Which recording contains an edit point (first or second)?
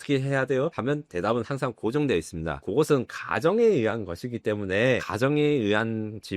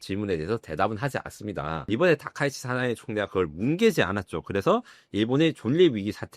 second